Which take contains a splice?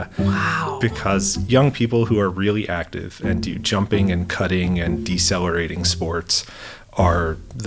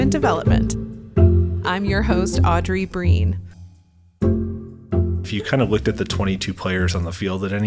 second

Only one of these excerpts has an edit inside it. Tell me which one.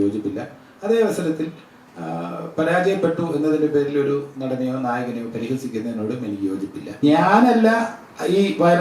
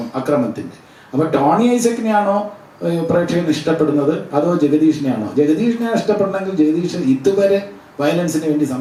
first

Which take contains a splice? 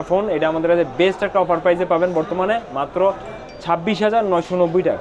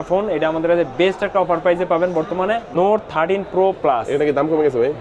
second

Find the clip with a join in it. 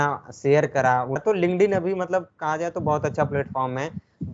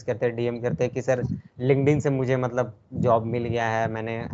first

